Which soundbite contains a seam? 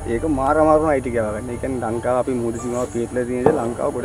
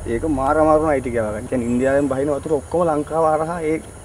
second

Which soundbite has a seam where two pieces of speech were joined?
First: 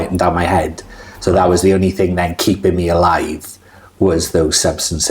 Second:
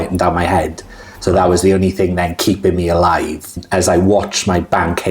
second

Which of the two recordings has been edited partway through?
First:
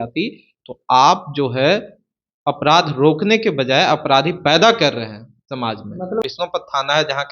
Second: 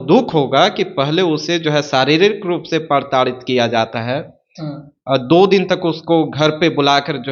first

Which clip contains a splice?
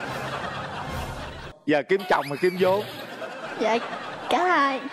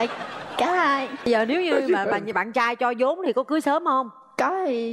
first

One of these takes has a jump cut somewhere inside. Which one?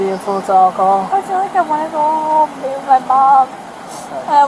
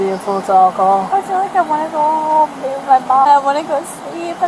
second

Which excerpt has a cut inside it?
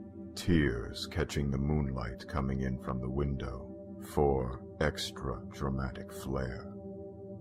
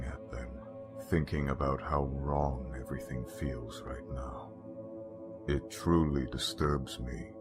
second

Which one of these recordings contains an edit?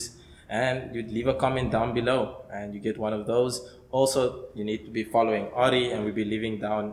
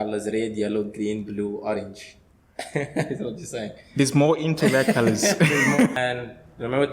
second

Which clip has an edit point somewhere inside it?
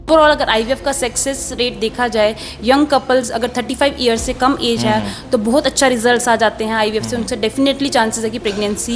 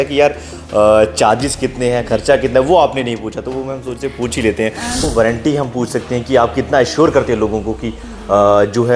second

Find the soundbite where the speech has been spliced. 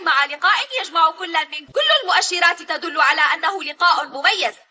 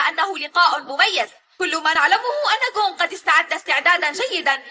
first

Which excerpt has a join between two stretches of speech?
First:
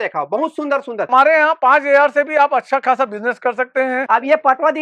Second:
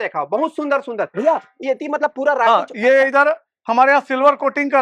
first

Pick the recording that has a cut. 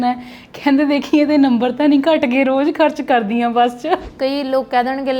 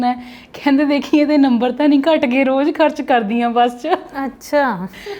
first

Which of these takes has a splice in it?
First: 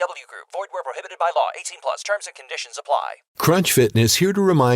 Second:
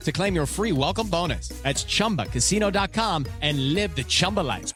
first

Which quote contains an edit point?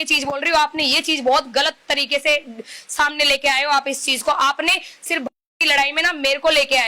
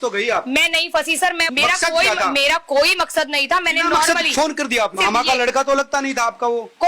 second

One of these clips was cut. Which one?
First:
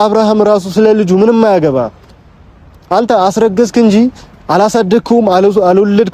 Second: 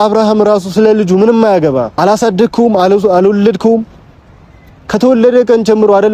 second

